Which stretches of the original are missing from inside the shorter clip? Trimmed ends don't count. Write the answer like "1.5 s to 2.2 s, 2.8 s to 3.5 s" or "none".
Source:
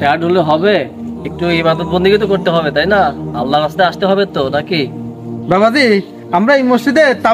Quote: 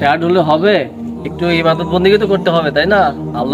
none